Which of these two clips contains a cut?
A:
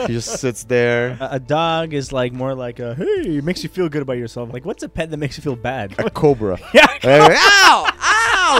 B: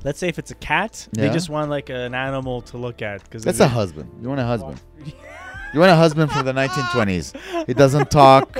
A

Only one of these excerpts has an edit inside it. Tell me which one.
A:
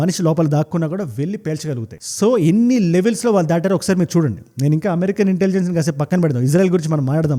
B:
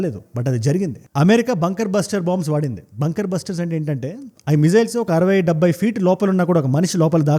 B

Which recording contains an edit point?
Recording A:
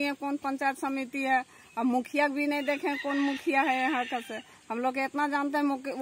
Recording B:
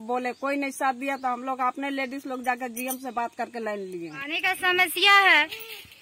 B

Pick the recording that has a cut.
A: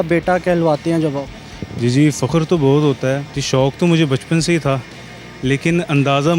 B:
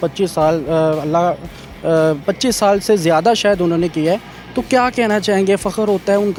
A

